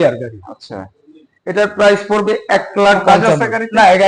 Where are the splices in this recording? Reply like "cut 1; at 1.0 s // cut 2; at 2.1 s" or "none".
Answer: cut 1; at 3.0 s